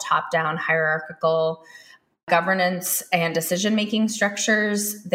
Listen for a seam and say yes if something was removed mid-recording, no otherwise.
yes